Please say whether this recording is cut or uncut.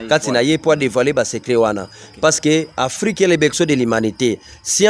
uncut